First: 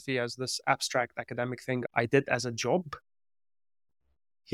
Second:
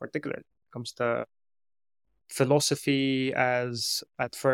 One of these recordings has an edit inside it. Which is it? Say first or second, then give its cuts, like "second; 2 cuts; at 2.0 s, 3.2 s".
first; 1 cut; at 1.8 s